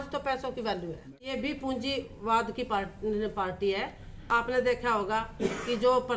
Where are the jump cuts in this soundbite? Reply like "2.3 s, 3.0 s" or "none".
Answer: 1.1 s, 4.5 s